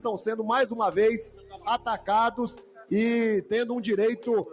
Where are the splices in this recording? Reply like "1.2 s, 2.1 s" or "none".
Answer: none